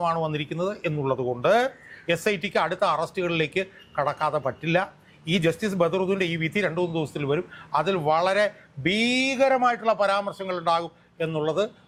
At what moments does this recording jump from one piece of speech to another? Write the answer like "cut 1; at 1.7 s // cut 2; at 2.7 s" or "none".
none